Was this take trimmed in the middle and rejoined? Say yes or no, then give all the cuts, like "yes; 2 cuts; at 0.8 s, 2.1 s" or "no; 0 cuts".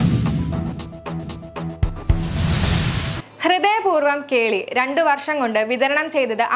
no; 0 cuts